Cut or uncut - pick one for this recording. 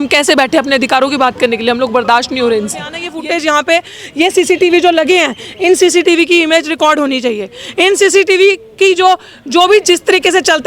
cut